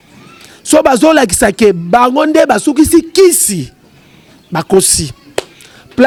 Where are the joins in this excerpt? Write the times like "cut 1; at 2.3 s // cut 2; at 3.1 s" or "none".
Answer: none